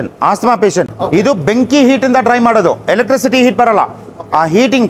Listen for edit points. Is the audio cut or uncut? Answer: cut